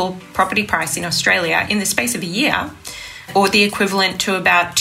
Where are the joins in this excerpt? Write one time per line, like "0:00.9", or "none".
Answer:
0:01.7
0:03.3